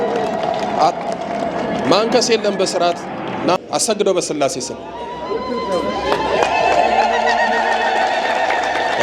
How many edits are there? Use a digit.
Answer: 1